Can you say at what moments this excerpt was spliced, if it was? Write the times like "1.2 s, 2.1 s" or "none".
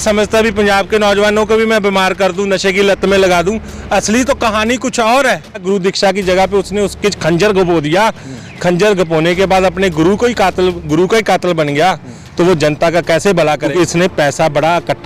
5.6 s, 13.7 s